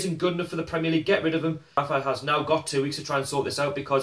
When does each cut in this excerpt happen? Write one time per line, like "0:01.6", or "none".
0:01.8